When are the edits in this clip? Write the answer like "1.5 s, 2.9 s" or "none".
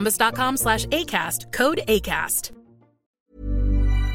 3.0 s